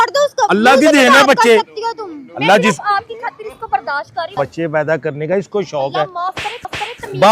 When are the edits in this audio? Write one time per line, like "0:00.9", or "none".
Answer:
0:04.2